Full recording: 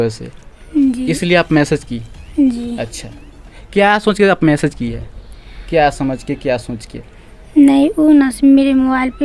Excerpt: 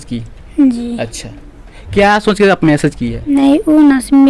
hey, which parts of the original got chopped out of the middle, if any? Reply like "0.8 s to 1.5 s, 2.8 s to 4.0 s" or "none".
5.1 s to 7.6 s